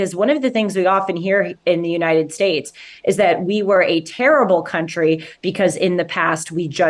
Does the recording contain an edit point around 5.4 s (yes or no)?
no